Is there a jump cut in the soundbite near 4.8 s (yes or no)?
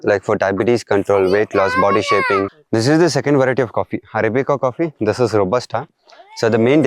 no